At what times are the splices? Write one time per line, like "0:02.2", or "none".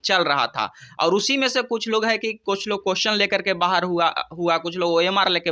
none